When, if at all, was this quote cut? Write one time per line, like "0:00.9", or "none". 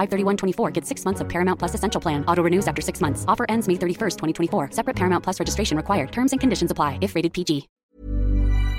0:07.9